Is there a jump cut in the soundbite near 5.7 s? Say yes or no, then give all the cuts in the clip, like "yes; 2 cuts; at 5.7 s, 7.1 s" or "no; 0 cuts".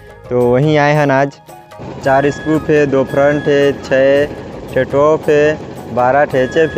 no; 1 cut; at 1.7 s